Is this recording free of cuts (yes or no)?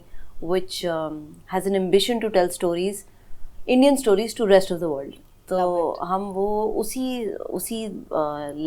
yes